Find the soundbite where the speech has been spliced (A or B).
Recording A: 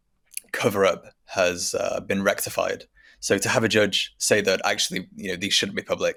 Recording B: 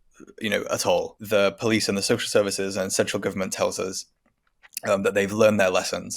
B